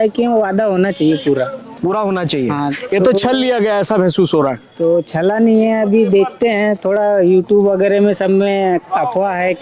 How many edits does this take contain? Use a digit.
0